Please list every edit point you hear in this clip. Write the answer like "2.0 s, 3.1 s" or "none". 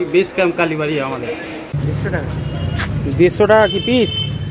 1.7 s